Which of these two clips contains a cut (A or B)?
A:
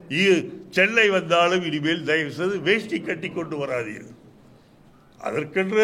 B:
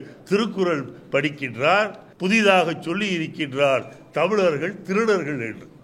B